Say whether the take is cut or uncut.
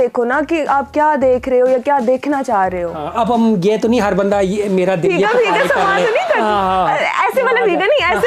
uncut